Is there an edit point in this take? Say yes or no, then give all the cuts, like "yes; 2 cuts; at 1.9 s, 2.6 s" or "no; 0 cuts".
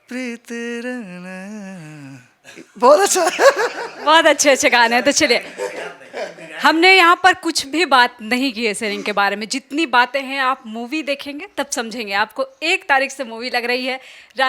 no; 0 cuts